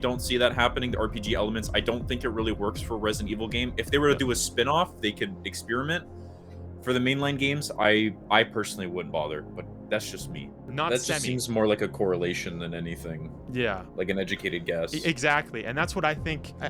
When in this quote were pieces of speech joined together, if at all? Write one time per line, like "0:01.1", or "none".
0:10.7